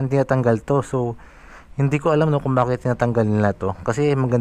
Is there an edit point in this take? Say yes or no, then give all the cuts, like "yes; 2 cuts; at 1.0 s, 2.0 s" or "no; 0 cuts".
no; 0 cuts